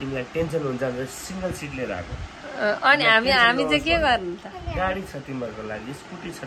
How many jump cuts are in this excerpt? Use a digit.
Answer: 0